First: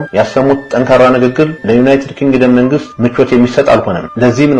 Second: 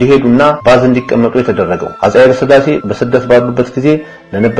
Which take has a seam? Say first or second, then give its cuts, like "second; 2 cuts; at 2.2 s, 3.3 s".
second; 1 cut; at 1.9 s